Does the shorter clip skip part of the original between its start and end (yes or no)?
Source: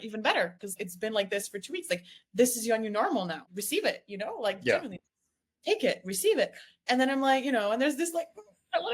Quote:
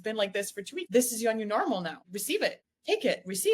yes